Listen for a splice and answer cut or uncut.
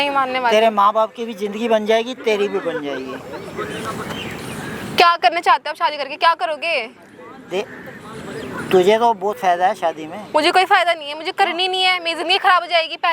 uncut